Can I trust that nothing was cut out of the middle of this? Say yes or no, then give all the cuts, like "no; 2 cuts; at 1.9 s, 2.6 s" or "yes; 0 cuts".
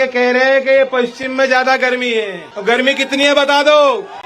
no; 1 cut; at 2.4 s